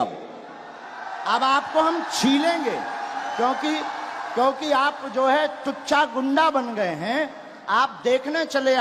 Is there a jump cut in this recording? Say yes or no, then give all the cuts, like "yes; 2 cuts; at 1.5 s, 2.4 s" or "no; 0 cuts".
no; 0 cuts